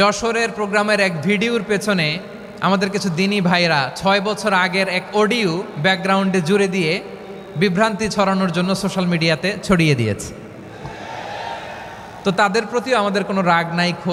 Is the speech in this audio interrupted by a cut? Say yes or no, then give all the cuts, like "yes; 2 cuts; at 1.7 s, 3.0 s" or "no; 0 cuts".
no; 0 cuts